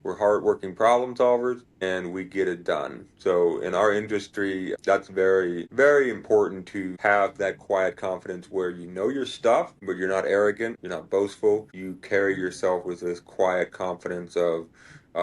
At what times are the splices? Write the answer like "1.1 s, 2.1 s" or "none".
1.7 s